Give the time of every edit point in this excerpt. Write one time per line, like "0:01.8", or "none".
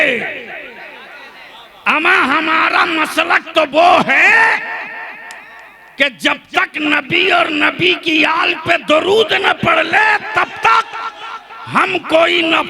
none